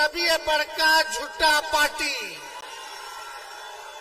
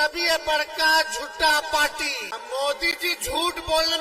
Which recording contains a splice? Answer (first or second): second